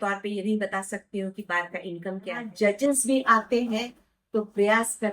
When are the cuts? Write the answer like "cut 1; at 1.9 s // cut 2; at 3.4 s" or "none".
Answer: cut 1; at 2.5 s